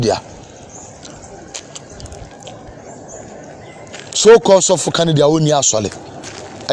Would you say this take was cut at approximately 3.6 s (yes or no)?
no